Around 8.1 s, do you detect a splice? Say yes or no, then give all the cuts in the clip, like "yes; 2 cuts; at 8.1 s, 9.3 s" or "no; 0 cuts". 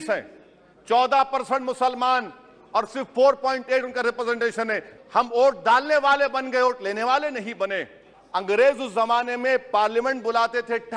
yes; 2 cuts; at 4.9 s, 8.1 s